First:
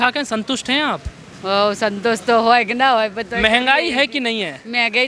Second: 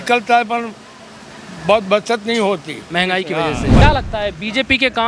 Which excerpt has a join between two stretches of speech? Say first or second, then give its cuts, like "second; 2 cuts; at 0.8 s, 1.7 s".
second; 1 cut; at 3.8 s